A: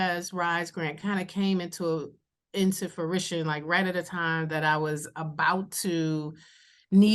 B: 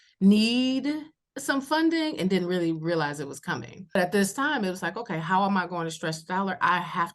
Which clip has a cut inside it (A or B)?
B